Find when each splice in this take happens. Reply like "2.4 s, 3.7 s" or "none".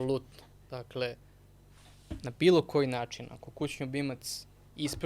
none